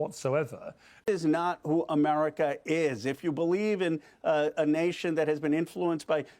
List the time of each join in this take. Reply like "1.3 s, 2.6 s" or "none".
1.0 s